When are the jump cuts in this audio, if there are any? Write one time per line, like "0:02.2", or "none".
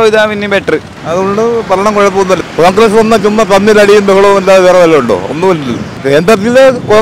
0:01.0
0:02.4
0:06.0